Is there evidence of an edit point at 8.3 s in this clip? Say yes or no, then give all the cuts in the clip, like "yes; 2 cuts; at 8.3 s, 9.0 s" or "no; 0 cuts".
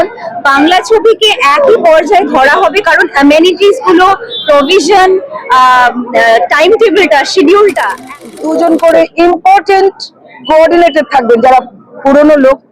yes; 1 cut; at 8.3 s